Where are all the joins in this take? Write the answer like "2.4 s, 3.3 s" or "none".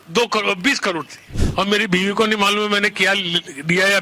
1.3 s

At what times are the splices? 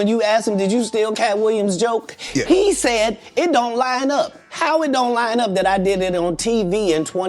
none

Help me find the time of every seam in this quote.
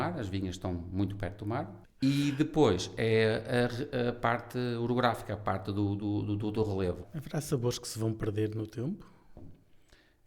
1.8 s, 7.1 s

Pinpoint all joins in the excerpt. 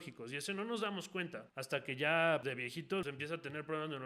1.5 s, 3.0 s

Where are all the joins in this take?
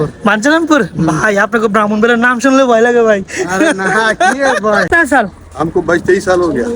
4.9 s

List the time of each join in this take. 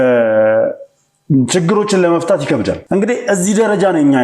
2.8 s

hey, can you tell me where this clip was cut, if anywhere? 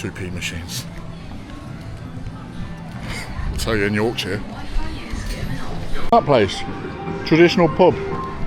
6.1 s

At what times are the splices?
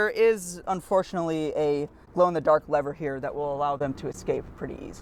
none

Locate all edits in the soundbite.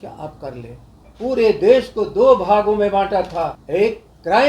1.0 s, 3.6 s

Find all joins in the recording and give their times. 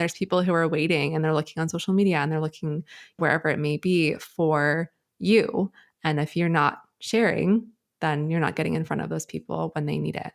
3.2 s

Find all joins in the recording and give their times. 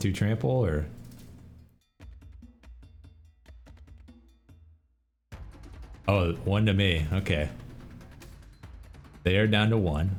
none

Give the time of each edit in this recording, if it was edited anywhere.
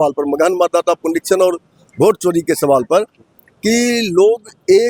none

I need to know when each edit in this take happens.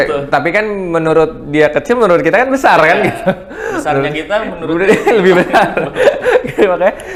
none

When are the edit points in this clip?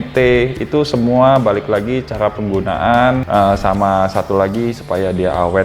3.2 s

